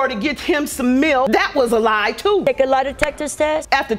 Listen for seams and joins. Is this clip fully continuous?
no; 1 cut; at 1.3 s

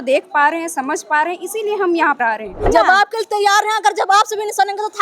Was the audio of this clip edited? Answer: yes; 1 cut; at 2.7 s

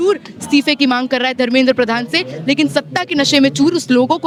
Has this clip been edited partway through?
no; 0 cuts

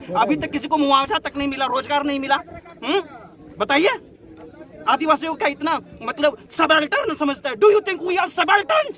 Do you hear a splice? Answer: no; 0 cuts

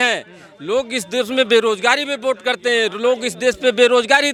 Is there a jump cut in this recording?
no; 0 cuts

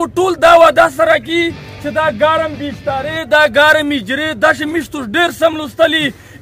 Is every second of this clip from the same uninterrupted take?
yes; 0 cuts

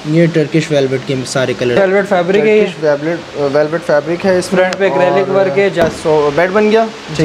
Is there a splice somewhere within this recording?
yes; 2 cuts; at 1.8 s, 5.8 s

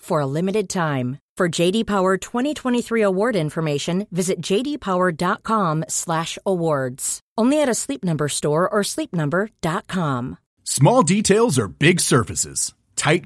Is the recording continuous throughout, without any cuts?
no; 1 cut; at 10.4 s

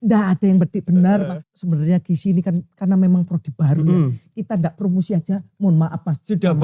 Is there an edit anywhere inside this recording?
yes; 1 cut; at 1.3 s

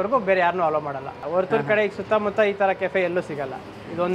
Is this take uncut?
no; 1 cut; at 1.1 s

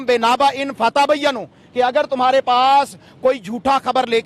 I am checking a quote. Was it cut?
no; 0 cuts

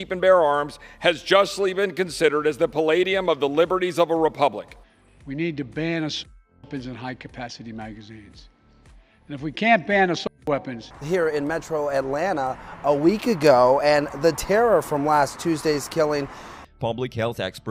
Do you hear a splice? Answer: no; 0 cuts

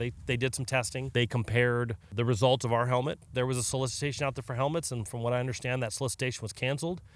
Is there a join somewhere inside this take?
yes; 3 cuts; at 1.1 s, 2.1 s, 3.2 s

